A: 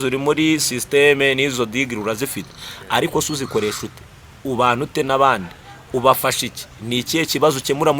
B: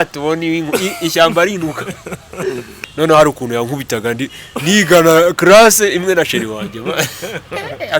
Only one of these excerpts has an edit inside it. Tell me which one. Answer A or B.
B